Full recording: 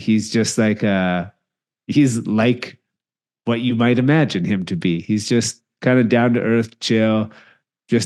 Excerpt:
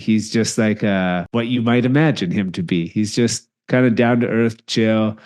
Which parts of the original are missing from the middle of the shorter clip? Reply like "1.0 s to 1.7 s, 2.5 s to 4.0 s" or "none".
1.2 s to 3.4 s